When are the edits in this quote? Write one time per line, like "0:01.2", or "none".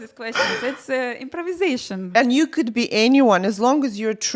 0:02.0

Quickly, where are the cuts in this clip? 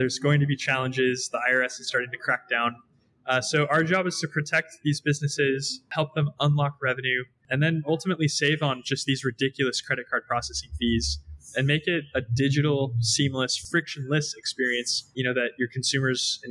0:05.9
0:07.4
0:13.6
0:15.0

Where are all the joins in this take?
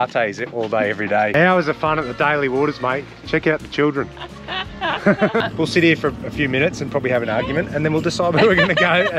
0:01.3
0:05.4

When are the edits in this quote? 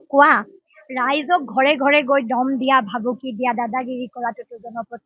none

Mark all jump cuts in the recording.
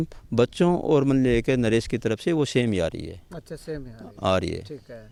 none

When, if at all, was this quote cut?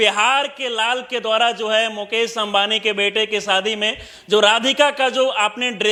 none

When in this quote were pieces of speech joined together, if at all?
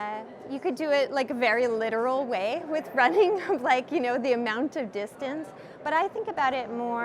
none

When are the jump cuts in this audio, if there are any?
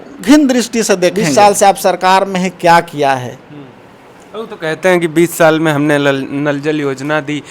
0:01.2

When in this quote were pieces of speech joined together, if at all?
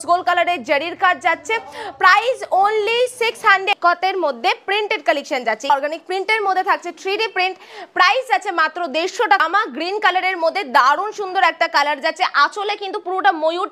0:03.7
0:05.7
0:09.4

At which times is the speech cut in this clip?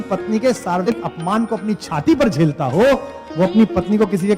0:00.9

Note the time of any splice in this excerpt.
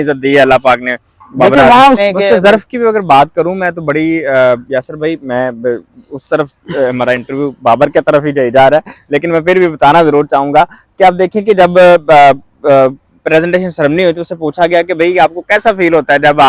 0:02.0

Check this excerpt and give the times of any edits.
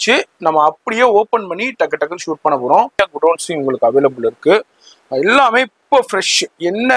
0:02.9

